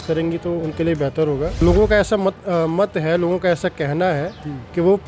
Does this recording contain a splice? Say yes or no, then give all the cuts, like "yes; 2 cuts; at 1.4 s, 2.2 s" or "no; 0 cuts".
yes; 1 cut; at 1.6 s